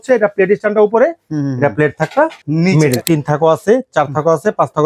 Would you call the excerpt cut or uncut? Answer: cut